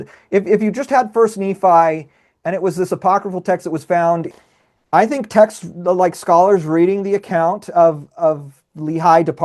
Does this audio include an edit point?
yes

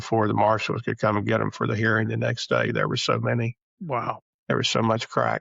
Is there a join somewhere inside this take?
yes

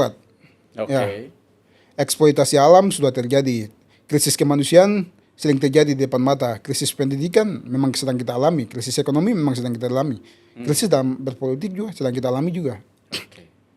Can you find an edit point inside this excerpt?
no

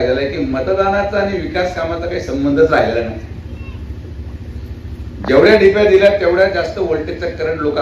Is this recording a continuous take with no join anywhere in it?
yes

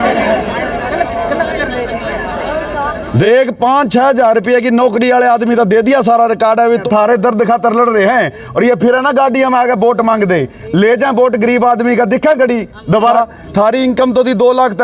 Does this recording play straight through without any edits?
no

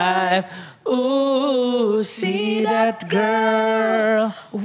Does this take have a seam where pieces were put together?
no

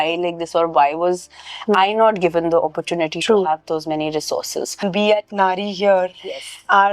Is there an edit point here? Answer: yes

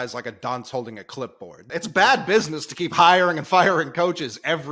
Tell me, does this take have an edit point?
yes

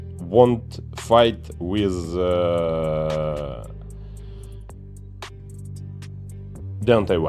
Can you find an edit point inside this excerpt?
no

